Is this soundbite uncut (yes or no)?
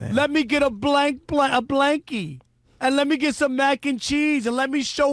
yes